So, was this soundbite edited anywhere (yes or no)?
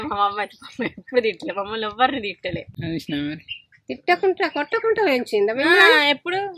no